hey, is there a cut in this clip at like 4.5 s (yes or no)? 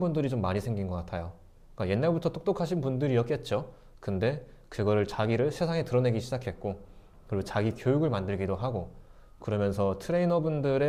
no